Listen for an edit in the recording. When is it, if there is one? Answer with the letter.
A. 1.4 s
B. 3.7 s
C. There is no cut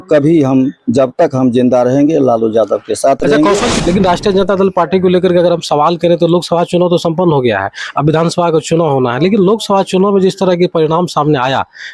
B